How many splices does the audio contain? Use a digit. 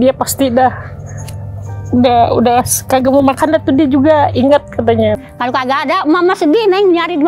1